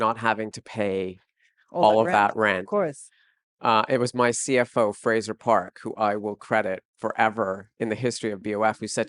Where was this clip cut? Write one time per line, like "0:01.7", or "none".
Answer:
0:07.7